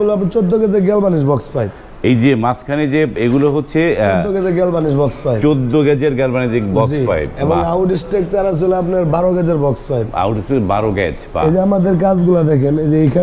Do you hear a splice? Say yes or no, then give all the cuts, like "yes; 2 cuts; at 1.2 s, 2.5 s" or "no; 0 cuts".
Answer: no; 0 cuts